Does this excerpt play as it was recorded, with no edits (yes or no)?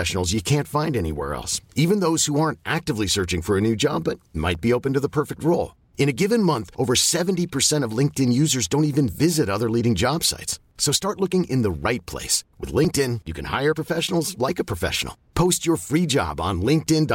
yes